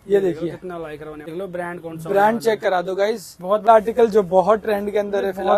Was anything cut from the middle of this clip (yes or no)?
yes